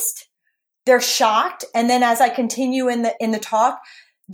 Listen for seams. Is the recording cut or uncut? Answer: cut